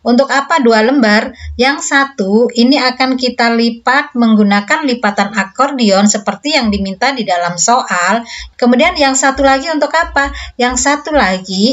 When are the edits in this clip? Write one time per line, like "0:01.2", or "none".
0:08.4